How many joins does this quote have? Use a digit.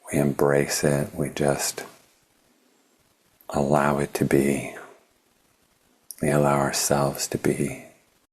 1